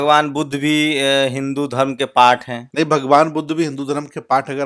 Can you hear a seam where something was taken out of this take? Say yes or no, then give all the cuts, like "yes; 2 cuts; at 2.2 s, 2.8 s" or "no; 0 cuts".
yes; 1 cut; at 2.6 s